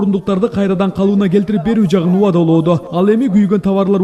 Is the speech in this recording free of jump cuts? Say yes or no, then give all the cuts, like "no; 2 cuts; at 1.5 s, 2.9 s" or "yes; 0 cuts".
yes; 0 cuts